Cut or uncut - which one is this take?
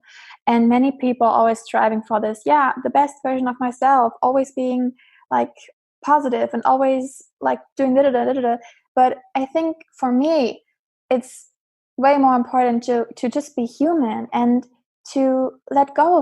uncut